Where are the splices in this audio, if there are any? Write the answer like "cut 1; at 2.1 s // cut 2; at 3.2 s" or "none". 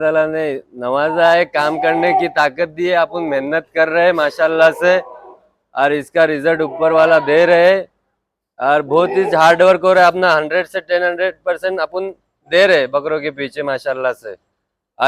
none